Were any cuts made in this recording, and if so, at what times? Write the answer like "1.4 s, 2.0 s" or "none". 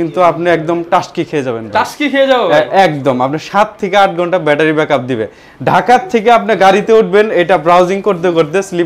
none